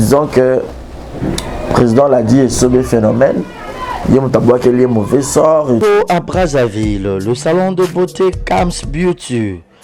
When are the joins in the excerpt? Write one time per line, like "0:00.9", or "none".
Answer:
0:05.8